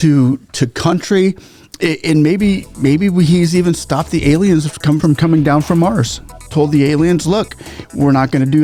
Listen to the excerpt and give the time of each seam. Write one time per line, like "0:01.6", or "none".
none